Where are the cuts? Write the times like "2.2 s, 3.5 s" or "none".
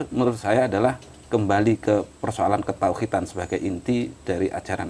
none